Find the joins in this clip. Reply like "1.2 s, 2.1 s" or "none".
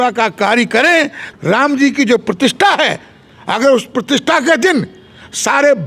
1.3 s